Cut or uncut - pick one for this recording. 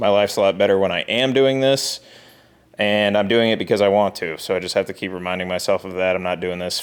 uncut